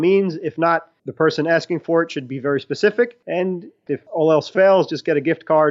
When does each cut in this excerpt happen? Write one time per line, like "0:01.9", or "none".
0:03.8